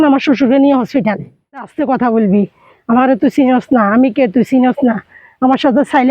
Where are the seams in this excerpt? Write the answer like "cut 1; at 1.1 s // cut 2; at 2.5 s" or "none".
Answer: cut 1; at 1.7 s